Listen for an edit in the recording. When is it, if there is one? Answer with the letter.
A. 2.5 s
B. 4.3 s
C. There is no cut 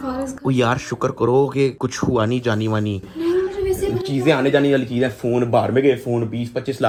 C